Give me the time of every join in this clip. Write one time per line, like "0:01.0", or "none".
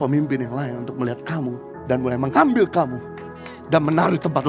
0:01.7